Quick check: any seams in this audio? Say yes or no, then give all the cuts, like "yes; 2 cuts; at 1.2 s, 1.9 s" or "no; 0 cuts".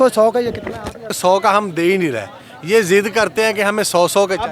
yes; 1 cut; at 1.1 s